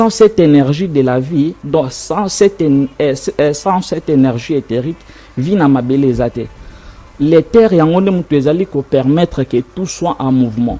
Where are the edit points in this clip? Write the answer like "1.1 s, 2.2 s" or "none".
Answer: none